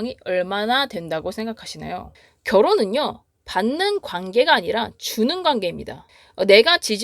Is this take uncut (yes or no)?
no